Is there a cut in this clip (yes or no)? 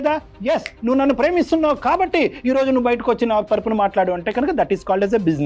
no